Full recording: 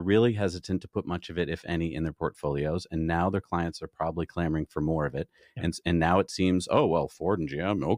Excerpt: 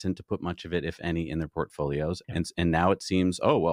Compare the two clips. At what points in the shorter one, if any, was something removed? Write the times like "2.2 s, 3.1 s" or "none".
2.2 s